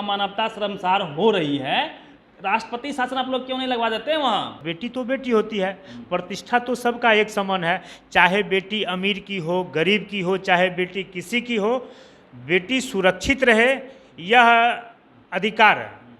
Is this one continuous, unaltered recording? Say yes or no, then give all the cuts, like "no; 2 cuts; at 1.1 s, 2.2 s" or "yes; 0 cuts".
no; 1 cut; at 4.6 s